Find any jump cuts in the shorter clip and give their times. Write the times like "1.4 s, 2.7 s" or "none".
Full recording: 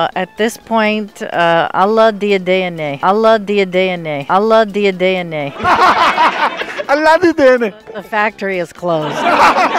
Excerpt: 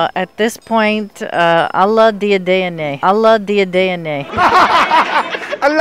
4.1 s